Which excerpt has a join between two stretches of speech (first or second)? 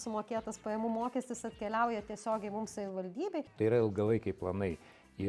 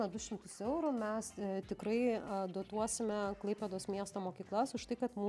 first